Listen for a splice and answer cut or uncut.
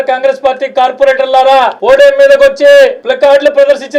cut